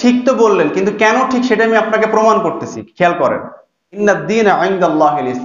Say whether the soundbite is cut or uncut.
cut